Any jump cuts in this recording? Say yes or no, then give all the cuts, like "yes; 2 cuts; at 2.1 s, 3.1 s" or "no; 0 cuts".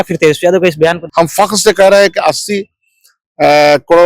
yes; 1 cut; at 1.0 s